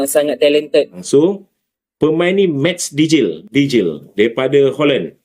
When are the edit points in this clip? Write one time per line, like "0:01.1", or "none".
0:01.0